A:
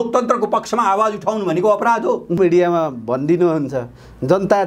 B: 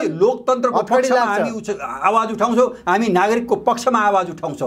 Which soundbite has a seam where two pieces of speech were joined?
A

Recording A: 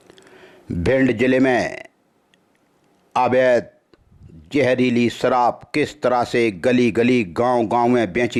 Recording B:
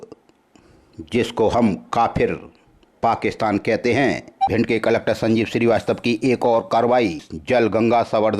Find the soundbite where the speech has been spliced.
B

